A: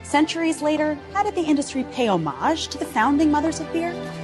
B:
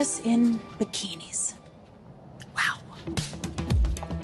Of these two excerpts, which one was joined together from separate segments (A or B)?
B